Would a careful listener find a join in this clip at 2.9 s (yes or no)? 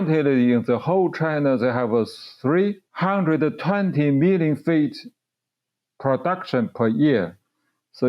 yes